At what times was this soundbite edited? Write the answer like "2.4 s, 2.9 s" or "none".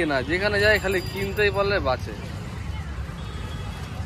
none